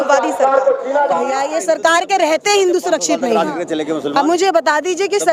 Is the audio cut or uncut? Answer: cut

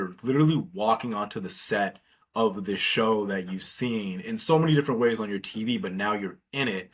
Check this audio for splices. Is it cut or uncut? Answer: uncut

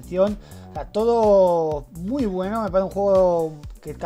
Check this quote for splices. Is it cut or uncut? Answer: cut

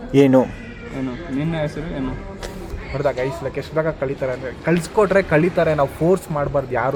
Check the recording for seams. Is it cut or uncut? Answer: uncut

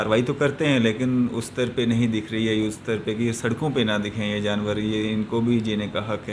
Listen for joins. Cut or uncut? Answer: uncut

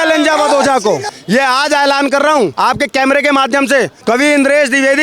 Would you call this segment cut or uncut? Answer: cut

